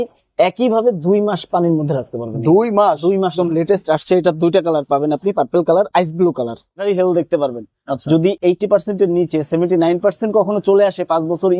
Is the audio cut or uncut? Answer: cut